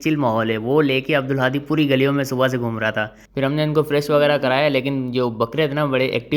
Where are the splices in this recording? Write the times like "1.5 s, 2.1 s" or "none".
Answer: 3.2 s